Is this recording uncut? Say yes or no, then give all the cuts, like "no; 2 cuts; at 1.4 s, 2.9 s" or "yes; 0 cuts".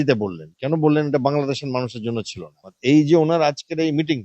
no; 1 cut; at 2.7 s